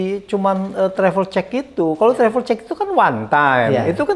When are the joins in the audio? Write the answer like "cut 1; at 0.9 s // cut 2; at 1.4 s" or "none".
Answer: none